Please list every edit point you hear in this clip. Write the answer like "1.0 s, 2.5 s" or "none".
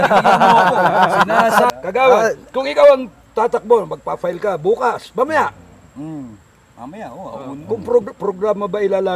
1.7 s